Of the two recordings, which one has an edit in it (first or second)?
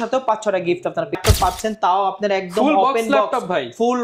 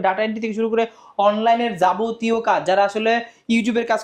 first